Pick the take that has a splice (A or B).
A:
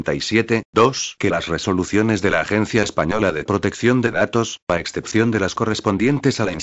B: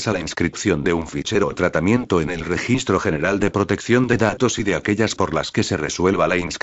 A